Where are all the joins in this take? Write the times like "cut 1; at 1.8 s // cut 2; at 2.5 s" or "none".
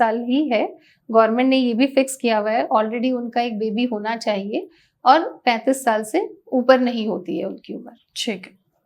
none